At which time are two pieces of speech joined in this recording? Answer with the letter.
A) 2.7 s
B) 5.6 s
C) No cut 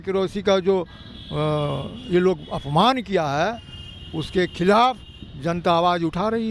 C